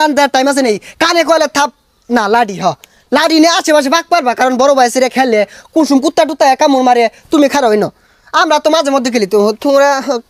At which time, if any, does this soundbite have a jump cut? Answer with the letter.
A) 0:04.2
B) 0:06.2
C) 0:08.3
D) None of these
D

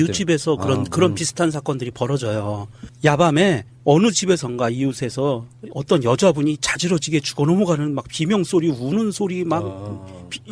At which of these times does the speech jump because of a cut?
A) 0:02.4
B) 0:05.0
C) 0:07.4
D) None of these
B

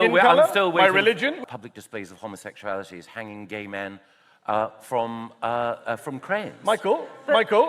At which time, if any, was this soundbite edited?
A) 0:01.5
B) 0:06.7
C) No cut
A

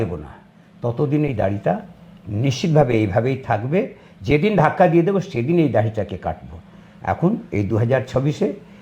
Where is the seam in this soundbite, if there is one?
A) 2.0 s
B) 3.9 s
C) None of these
C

